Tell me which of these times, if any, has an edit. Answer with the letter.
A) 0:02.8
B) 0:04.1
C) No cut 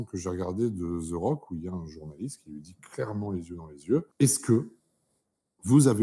B